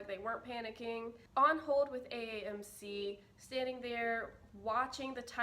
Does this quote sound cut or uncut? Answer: cut